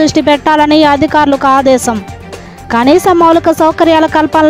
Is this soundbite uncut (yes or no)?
yes